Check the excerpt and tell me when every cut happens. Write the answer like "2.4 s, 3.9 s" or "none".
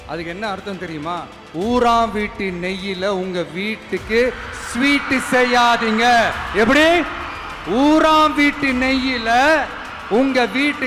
none

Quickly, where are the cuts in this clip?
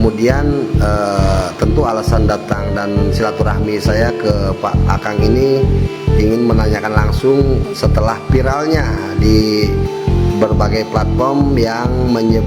none

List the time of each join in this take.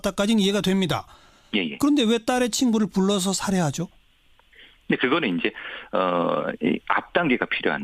6.1 s

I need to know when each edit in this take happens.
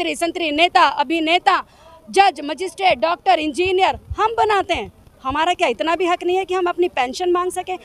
none

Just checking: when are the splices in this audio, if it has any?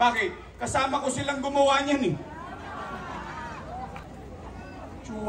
4.0 s

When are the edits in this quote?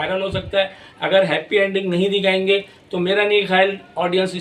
none

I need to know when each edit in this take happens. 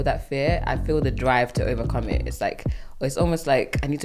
none

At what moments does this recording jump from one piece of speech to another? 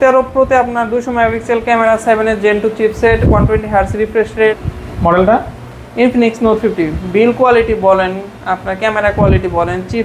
4.7 s

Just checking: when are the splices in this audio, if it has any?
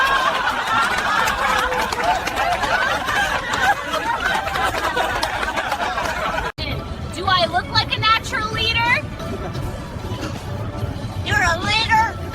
6.5 s

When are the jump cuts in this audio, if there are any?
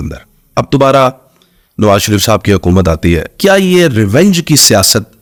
none

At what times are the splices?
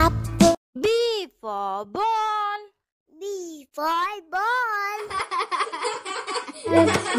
5.1 s, 6.2 s

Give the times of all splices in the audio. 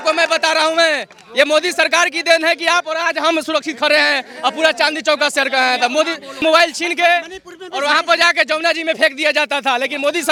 none

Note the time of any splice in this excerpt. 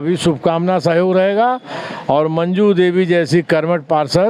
none

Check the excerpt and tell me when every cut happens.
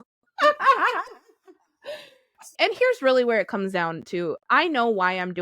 2.4 s, 4.4 s

